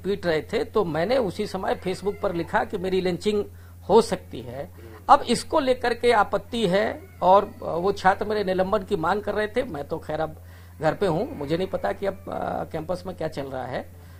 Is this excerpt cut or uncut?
uncut